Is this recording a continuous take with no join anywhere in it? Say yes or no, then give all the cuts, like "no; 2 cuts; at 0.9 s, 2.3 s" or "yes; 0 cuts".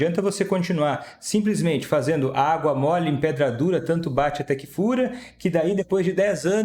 yes; 0 cuts